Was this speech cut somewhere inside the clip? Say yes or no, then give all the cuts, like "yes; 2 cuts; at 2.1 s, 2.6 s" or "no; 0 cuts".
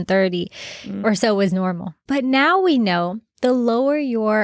yes; 1 cut; at 1.9 s